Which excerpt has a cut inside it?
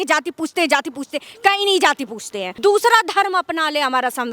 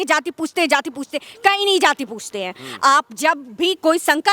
first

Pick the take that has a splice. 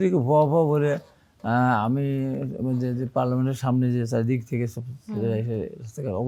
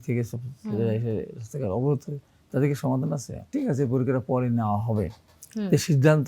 second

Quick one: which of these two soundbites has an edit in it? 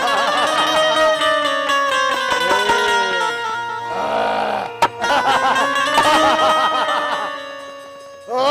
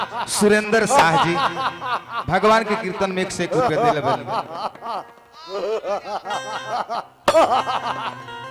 second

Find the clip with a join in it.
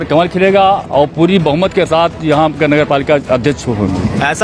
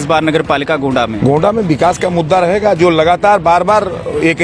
second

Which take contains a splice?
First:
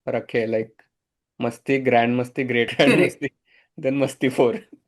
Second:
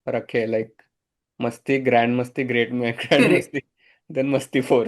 first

